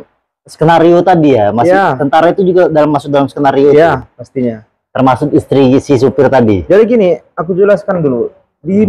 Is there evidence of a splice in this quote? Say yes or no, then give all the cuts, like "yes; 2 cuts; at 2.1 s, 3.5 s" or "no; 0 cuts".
no; 0 cuts